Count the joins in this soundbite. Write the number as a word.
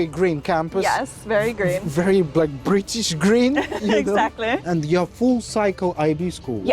one